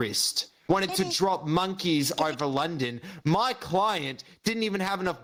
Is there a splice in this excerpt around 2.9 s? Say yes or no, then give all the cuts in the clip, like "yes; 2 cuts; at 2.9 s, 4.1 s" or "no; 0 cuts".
no; 0 cuts